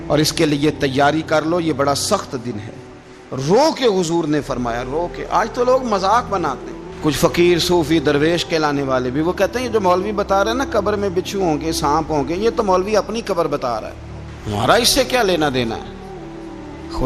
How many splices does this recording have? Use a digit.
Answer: 0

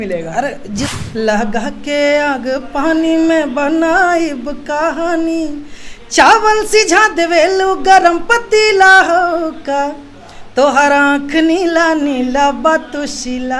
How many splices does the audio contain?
1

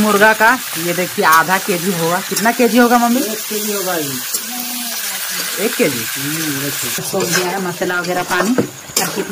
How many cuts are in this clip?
1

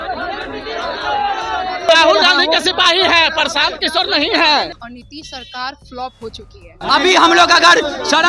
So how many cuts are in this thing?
3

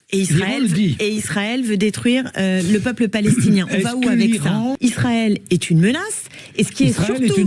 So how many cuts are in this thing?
1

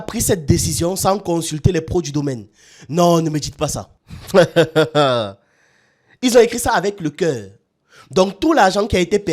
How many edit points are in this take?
0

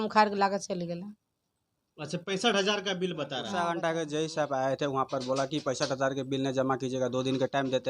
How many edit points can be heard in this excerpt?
1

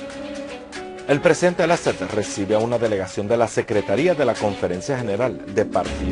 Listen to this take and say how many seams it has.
1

